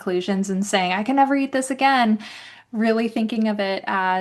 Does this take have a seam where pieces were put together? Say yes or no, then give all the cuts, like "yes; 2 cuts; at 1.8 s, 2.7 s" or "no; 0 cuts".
no; 0 cuts